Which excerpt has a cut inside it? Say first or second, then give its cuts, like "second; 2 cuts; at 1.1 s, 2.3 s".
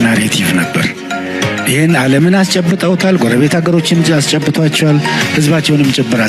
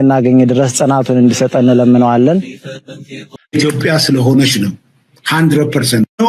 second; 1 cut; at 3.4 s